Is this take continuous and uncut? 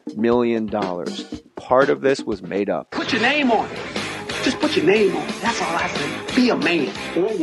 yes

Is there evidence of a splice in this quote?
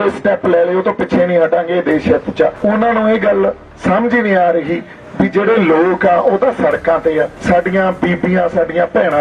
yes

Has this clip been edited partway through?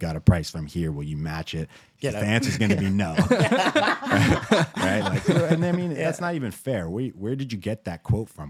no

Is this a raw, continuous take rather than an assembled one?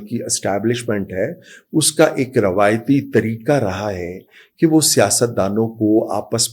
yes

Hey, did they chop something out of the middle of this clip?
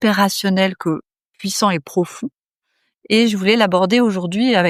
no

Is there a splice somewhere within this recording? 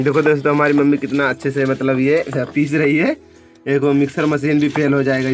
no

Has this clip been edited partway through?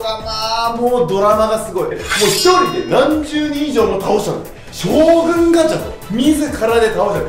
yes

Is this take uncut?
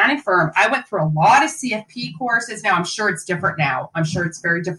yes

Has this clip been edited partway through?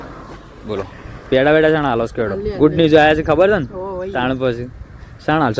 no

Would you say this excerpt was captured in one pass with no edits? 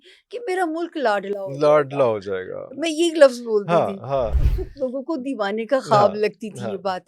no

